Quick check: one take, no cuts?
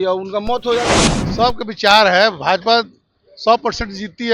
no; 1 cut; at 1.0 s

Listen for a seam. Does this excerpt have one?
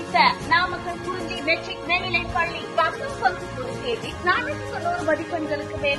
no; 0 cuts

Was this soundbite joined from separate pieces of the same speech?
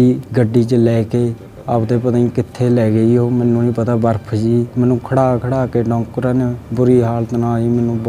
no; 0 cuts

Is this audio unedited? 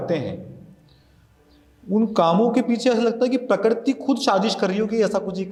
yes; 0 cuts

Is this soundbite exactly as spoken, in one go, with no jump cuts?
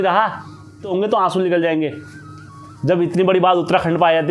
no; 1 cut; at 0.9 s

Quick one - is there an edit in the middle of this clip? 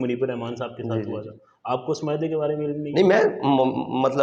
no; 0 cuts

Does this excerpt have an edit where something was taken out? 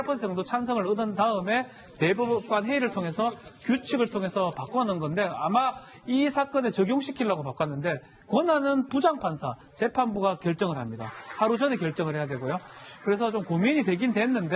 yes; 1 cut; at 3.1 s

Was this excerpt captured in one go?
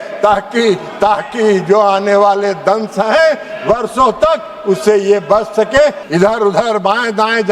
no; 1 cut; at 6.0 s

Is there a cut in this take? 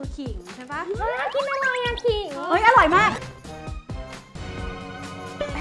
no; 0 cuts

